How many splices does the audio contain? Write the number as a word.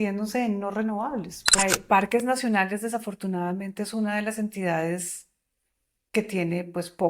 one